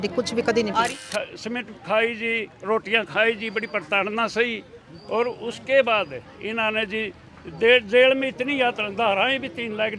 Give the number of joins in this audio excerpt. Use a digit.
1